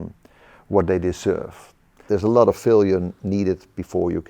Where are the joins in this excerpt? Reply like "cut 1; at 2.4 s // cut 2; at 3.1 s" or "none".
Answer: cut 1; at 2.0 s